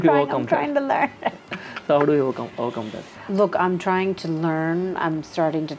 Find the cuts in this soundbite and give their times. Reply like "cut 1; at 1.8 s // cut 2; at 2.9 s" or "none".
none